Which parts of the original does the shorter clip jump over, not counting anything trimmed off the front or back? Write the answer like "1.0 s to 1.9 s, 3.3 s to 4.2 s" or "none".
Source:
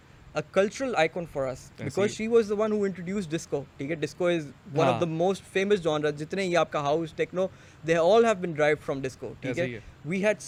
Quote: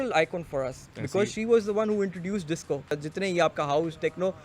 3.8 s to 6.1 s